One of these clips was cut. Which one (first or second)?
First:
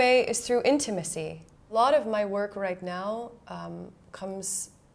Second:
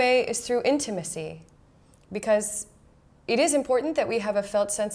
first